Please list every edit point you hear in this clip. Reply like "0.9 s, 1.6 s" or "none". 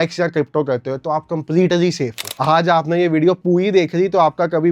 2.3 s